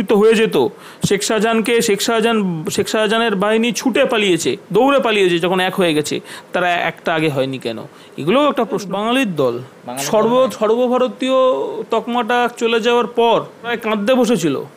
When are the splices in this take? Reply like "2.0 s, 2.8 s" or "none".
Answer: 8.9 s, 13.8 s